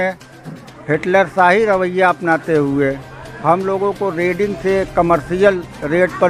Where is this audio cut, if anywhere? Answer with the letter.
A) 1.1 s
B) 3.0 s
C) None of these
C